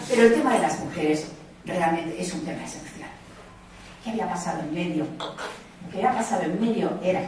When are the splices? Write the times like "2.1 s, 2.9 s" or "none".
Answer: 1.5 s